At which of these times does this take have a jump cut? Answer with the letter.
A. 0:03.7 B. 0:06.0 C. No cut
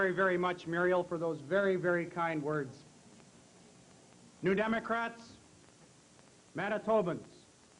C